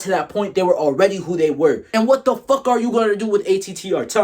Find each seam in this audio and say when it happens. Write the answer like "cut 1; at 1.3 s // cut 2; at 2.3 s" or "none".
cut 1; at 1.8 s